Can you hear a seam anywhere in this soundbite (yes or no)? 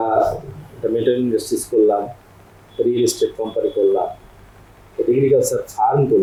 no